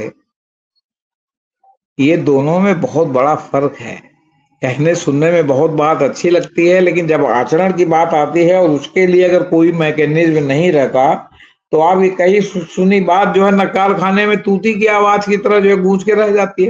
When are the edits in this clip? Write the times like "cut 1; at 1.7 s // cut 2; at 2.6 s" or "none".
none